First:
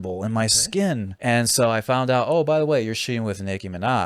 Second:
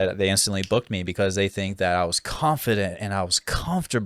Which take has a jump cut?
first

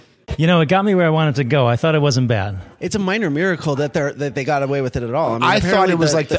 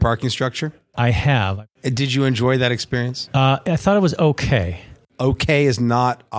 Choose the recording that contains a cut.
second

